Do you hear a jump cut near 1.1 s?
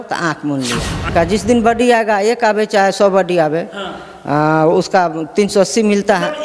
yes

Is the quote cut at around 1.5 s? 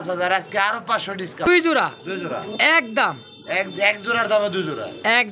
yes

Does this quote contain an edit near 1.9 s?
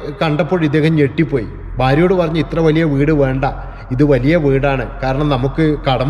no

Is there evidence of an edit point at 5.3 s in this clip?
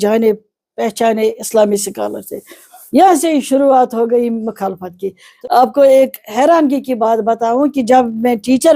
yes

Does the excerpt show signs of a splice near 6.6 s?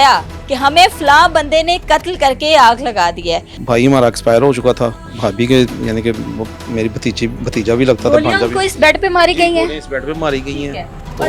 no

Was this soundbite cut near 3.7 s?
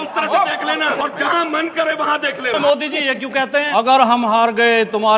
yes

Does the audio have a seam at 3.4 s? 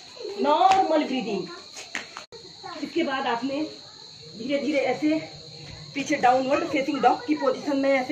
no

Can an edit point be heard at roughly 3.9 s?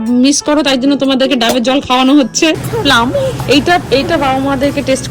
no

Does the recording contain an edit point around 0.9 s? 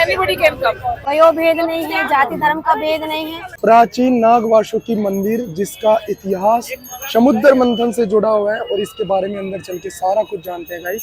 yes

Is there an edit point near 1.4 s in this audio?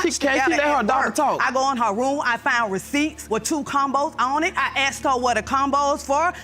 yes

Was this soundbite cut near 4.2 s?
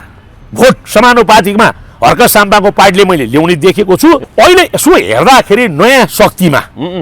yes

